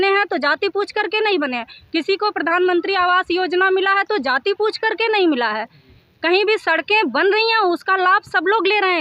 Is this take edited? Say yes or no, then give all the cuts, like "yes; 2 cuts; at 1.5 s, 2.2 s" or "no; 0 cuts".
no; 0 cuts